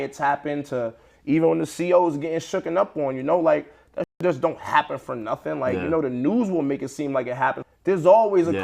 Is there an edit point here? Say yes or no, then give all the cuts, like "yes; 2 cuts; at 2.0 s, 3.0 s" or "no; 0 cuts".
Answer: yes; 1 cut; at 7.7 s